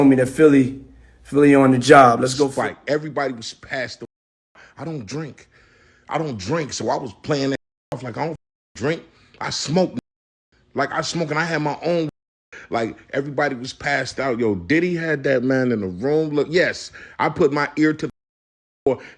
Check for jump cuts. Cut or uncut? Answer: cut